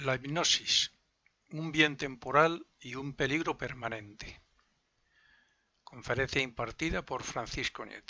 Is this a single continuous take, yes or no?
yes